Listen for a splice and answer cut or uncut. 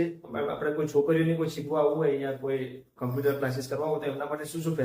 uncut